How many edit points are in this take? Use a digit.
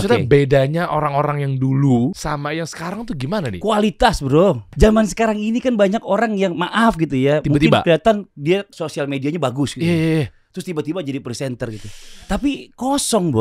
3